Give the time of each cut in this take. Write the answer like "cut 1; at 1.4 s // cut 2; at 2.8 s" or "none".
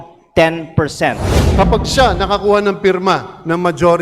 cut 1; at 1.3 s